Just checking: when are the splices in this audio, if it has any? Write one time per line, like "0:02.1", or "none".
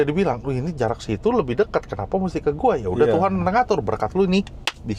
none